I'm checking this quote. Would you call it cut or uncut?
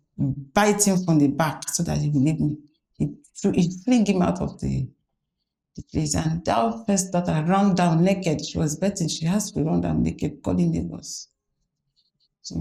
uncut